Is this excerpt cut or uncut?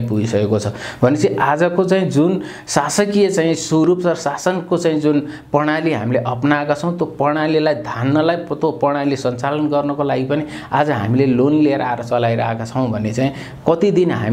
uncut